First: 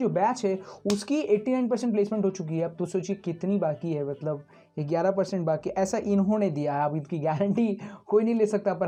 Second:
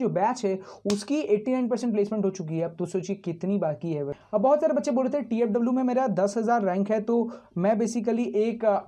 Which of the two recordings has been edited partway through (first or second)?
second